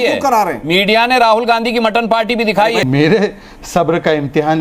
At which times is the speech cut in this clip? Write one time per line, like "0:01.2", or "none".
0:02.8